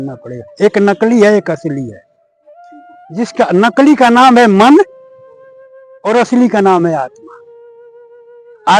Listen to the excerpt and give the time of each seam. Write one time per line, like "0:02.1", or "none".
none